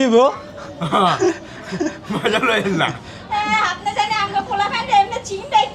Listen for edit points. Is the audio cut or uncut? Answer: uncut